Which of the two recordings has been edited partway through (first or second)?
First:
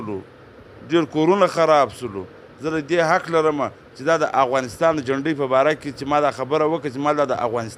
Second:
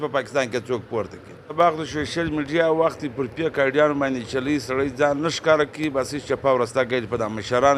second